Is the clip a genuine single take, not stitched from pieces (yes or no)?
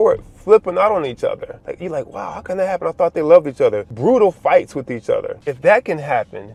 yes